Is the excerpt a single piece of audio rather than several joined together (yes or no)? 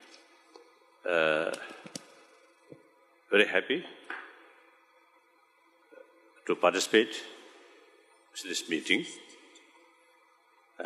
yes